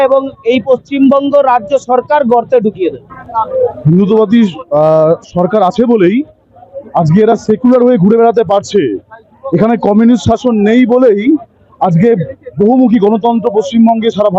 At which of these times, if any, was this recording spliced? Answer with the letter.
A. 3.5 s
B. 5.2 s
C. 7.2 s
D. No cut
A